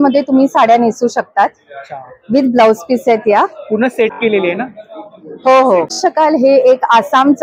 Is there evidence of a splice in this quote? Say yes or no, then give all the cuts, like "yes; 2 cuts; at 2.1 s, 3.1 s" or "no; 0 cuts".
no; 0 cuts